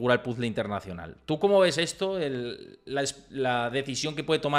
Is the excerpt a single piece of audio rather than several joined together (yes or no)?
yes